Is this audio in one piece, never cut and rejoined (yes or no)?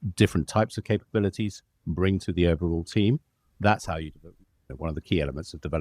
yes